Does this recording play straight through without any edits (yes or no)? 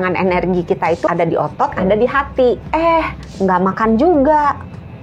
no